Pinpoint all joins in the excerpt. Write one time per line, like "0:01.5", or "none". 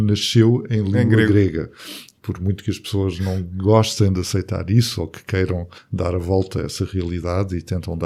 none